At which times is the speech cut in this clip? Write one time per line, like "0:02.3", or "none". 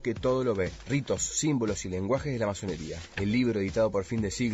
0:02.9